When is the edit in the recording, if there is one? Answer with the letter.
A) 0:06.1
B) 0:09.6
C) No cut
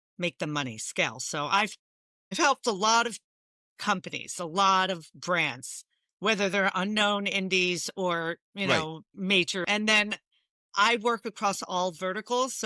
B